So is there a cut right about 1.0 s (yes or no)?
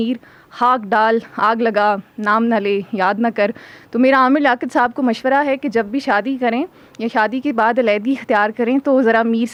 no